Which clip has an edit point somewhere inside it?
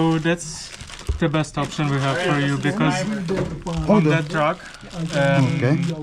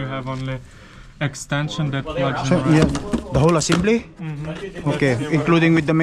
second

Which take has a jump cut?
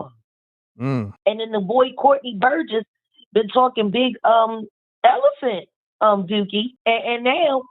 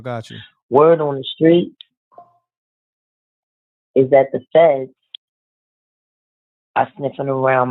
first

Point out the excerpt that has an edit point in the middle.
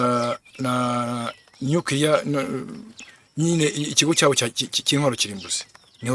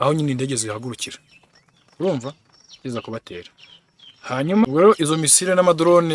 second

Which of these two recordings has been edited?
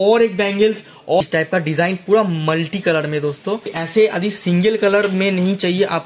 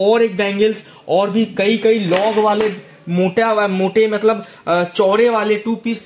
first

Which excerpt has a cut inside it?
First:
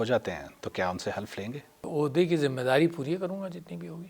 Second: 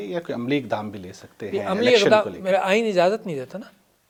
first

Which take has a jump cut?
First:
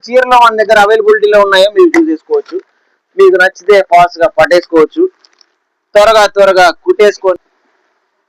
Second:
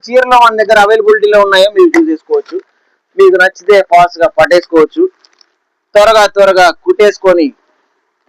first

